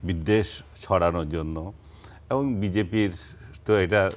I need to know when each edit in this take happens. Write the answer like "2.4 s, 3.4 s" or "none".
none